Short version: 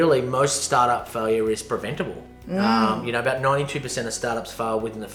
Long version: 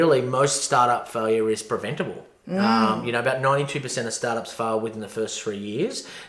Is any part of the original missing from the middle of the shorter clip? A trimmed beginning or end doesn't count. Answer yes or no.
no